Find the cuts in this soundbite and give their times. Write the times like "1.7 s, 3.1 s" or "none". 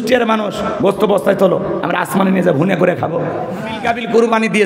3.7 s